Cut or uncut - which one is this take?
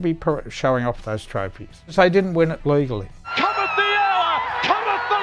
cut